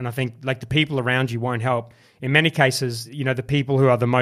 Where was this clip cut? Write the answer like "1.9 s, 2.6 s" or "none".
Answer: 3.1 s